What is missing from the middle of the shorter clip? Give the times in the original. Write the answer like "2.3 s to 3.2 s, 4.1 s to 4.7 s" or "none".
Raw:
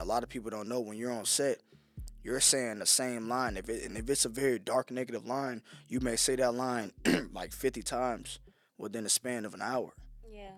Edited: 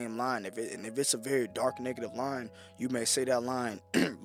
none

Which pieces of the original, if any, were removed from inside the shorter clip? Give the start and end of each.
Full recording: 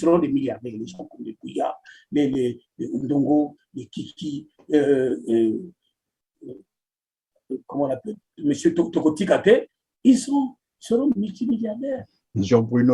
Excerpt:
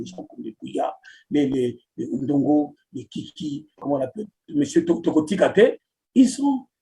4.5 s to 7.6 s

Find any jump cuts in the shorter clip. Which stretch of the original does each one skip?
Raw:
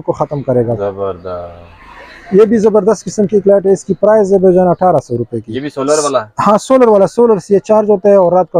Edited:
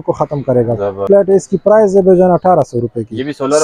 1.1 s to 3.4 s

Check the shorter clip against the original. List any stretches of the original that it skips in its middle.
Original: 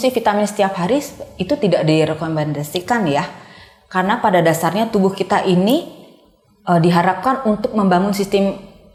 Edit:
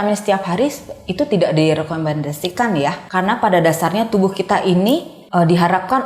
3.3 s to 3.8 s, 6.0 s to 6.5 s

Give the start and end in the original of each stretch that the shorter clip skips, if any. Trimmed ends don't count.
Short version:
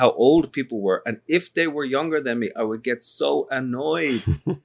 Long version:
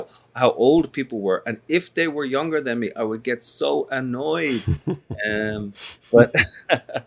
none

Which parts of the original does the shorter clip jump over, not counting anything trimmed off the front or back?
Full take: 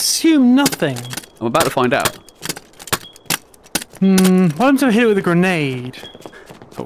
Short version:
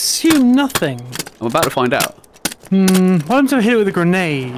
2.2 s to 3.5 s

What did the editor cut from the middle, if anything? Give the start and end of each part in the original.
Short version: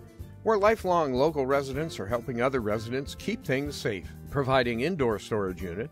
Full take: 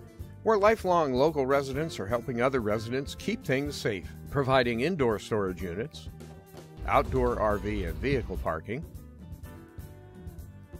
none

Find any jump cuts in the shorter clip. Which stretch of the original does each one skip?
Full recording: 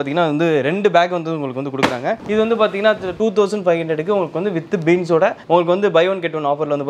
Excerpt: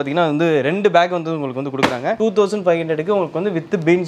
2.2 s to 3.2 s

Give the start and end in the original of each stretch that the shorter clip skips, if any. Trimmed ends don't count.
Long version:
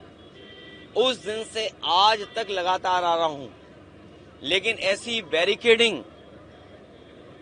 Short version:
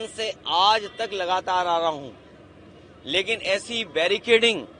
none

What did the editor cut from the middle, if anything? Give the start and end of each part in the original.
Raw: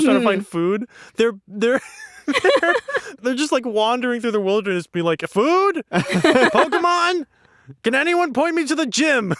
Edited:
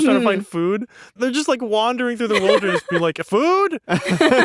1.0 s to 3.0 s

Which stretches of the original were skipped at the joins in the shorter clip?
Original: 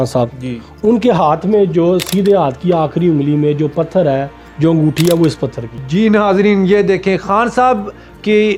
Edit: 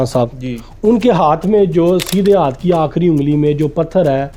none

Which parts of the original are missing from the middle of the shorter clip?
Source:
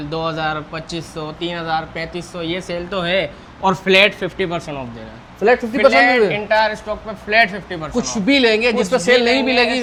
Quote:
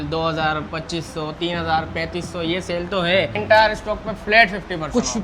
3.4 s to 6.4 s

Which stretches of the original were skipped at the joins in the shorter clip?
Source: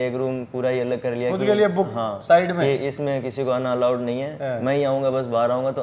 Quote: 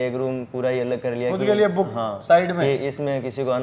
none

